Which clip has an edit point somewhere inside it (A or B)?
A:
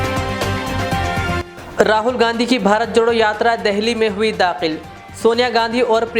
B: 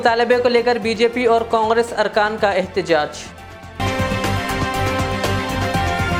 A